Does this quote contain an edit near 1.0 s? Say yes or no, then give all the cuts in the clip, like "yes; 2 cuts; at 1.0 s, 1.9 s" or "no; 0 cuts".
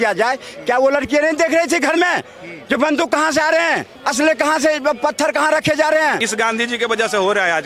no; 2 cuts; at 4.0 s, 6.2 s